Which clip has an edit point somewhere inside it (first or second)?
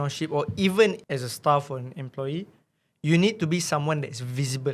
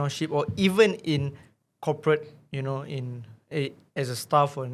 first